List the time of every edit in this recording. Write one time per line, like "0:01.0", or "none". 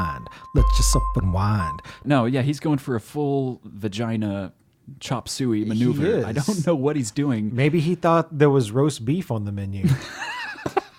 0:02.0